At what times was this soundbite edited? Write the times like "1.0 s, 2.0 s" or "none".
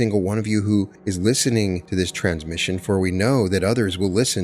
1.0 s, 1.8 s

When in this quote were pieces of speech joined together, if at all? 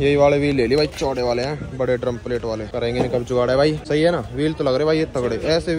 2.7 s, 3.8 s

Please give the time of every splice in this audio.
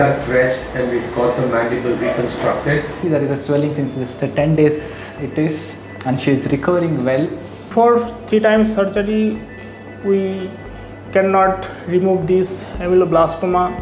3.0 s, 7.7 s

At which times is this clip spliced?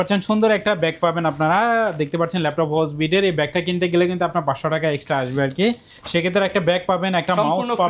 none

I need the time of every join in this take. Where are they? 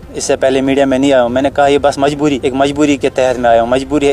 2.4 s

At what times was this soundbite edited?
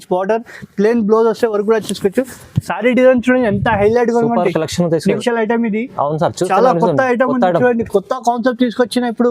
5.2 s

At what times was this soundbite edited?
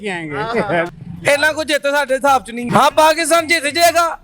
1.0 s, 2.6 s

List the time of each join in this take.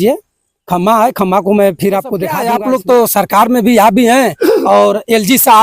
2.3 s

